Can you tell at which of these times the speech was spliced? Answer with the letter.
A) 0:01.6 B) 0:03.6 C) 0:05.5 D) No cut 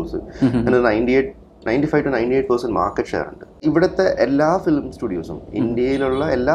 B